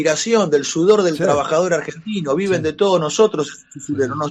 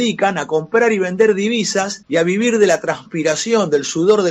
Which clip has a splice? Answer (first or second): second